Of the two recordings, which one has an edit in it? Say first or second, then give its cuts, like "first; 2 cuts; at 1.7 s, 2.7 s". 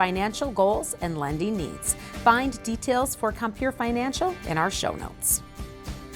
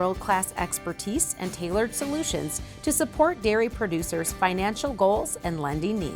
first; 1 cut; at 5.2 s